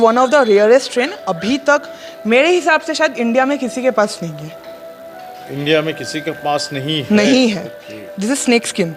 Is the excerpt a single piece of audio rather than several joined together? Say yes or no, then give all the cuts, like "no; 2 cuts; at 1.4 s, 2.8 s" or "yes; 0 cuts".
yes; 0 cuts